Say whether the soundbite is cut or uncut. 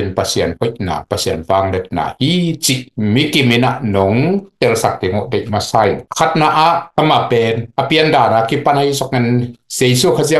uncut